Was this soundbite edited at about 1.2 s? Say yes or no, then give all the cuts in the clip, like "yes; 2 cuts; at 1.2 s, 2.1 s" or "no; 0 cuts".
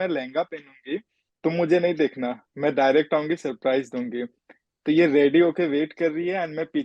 yes; 1 cut; at 1.2 s